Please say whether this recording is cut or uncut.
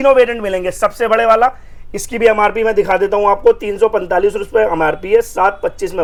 uncut